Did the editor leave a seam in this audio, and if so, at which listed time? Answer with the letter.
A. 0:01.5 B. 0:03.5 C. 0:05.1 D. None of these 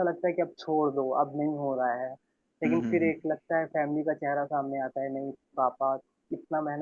D